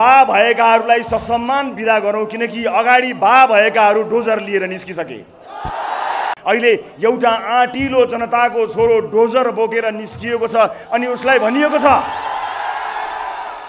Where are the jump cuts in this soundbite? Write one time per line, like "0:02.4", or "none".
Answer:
0:06.4

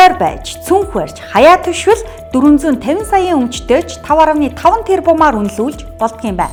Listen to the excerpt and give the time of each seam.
none

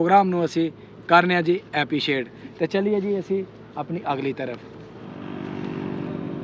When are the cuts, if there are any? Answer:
0:05.3

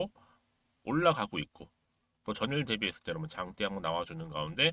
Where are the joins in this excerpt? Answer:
none

